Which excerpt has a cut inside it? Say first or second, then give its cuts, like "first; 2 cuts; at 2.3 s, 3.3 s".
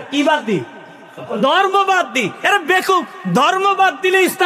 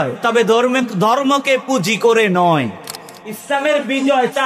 second; 1 cut; at 3.4 s